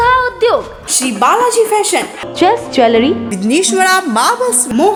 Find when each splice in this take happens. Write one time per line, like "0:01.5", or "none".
none